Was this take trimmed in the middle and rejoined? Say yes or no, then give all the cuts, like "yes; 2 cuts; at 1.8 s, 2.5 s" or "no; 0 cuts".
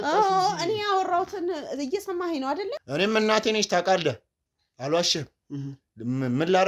yes; 1 cut; at 2.8 s